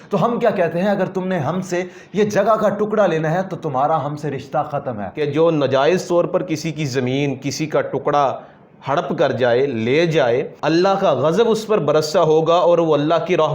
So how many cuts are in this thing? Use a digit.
2